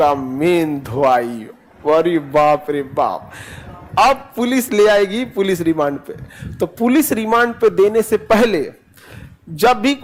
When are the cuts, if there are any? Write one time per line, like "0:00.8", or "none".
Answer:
none